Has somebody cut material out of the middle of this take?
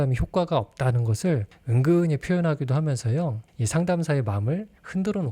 no; 0 cuts

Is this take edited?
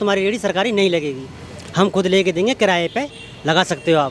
no; 0 cuts

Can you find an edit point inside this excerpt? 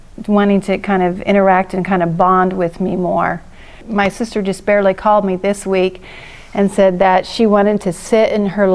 yes; 1 cut; at 3.5 s

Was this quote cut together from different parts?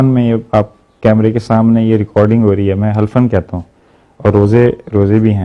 no; 0 cuts

